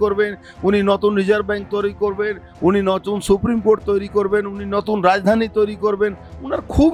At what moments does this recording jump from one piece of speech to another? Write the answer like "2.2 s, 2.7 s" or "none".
none